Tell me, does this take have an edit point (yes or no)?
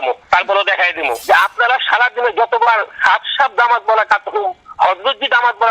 yes